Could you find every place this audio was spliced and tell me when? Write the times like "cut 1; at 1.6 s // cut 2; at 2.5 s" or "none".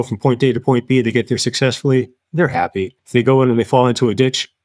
cut 1; at 3.0 s